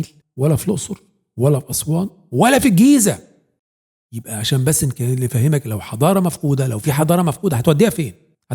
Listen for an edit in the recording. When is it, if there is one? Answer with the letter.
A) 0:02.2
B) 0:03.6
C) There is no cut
B